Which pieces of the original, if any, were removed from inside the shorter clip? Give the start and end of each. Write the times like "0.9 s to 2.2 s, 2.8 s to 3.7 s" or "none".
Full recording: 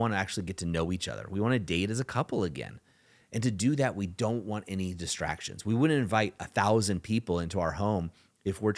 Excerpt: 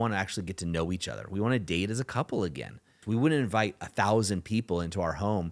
2.9 s to 5.5 s

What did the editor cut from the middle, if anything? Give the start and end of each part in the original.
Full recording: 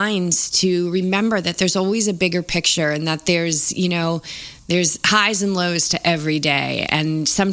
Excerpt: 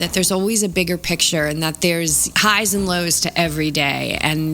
3.7 s to 4.9 s

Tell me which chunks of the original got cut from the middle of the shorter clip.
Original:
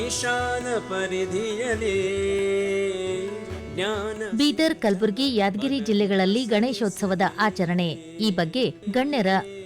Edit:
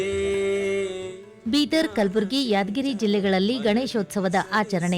3.3 s to 4.2 s

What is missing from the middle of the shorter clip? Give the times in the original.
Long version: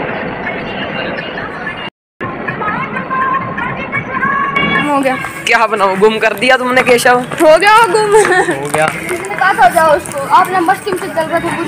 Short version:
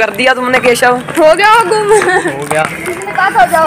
none

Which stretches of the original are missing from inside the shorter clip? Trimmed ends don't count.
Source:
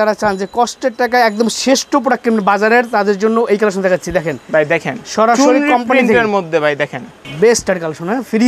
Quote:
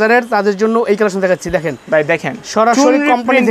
none

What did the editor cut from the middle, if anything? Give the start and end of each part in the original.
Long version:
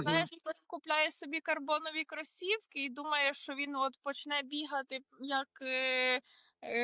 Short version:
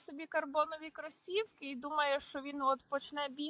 none

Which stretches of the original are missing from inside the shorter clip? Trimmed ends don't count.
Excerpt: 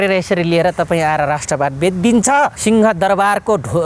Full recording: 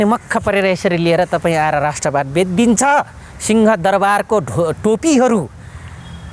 3.1 s to 3.4 s

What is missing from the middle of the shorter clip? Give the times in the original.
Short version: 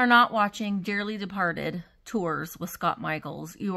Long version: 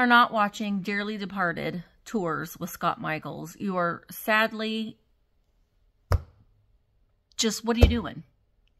none

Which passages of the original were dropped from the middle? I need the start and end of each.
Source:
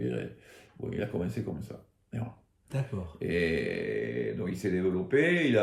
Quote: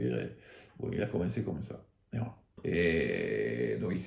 2.5 s to 3.1 s

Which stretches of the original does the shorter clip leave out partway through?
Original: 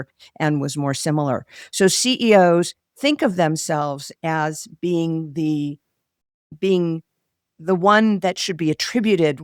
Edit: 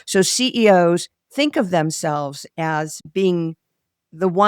4.6 s to 6.4 s

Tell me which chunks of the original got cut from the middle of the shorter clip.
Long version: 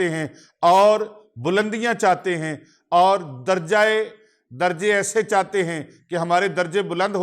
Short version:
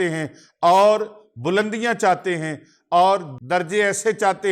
3.3 s to 4.4 s

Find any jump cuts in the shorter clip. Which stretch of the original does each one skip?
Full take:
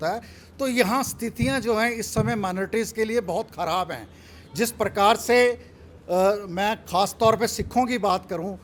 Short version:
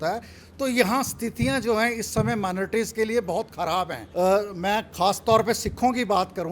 4.0 s to 5.9 s

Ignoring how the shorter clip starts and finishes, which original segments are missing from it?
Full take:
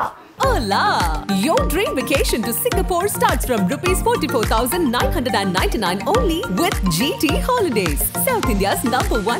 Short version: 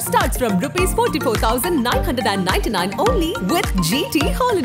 none

